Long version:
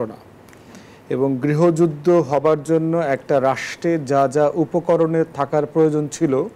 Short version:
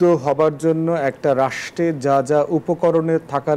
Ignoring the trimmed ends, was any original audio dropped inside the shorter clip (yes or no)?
no